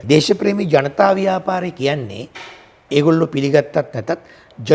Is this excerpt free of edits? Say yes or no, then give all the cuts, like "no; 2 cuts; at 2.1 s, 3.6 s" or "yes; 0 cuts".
yes; 0 cuts